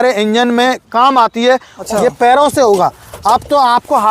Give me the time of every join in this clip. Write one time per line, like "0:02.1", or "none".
0:01.7

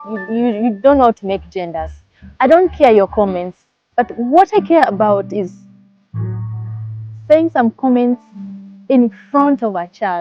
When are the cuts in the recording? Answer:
none

